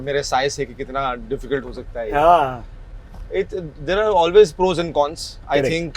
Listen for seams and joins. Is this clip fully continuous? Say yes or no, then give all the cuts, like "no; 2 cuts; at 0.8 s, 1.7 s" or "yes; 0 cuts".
yes; 0 cuts